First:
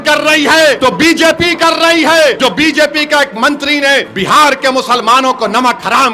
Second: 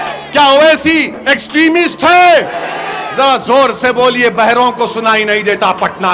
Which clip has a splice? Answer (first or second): first